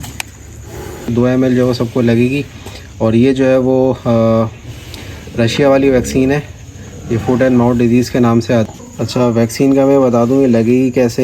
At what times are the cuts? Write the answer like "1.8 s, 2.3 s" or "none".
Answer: 1.1 s, 8.7 s